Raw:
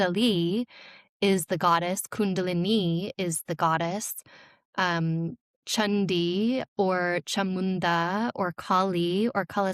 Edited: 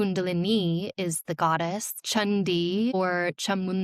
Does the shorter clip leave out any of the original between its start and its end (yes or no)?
yes